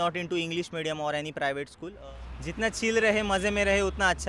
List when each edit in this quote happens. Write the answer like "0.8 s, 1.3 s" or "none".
1.9 s